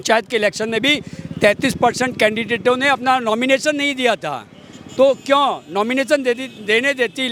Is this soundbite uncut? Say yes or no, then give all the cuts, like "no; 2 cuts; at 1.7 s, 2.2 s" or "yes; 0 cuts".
yes; 0 cuts